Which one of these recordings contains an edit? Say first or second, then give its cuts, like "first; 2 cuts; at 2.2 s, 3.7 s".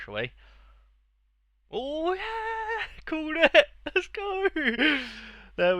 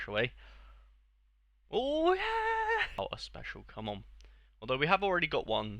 second; 1 cut; at 3.0 s